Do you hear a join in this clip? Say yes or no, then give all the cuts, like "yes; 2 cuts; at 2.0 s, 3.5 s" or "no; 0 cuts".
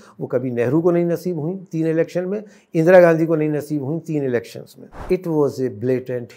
yes; 1 cut; at 4.9 s